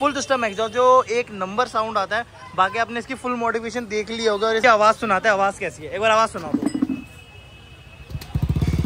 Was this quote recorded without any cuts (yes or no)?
yes